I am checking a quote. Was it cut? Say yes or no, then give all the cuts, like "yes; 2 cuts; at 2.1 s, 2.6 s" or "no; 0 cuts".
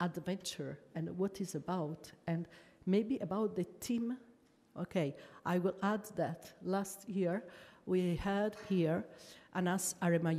no; 0 cuts